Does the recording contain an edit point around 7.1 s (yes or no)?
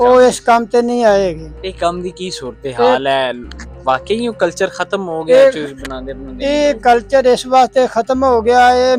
no